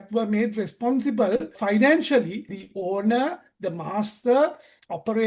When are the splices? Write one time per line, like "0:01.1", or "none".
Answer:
0:01.6
0:02.6